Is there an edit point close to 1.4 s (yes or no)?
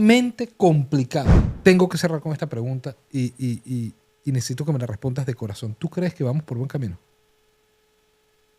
yes